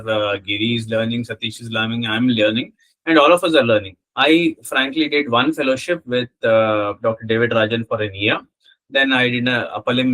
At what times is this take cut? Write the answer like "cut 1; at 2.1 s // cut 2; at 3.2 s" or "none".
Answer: cut 1; at 4.0 s